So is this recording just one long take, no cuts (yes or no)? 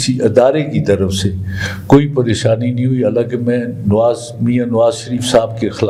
yes